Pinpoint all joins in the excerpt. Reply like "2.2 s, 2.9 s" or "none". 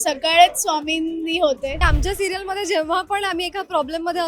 1.8 s